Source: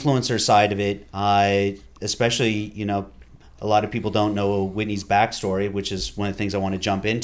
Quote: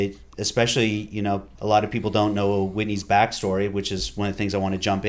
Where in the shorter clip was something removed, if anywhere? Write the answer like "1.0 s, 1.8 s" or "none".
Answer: 1.5 s